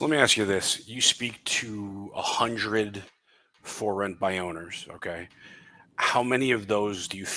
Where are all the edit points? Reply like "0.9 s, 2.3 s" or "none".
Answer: none